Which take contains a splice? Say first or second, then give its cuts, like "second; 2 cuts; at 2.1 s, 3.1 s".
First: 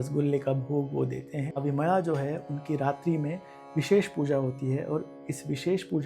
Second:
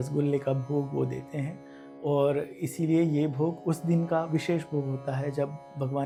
first; 1 cut; at 1.6 s